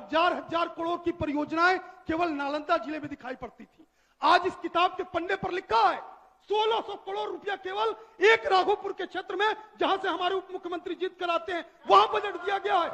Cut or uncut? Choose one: uncut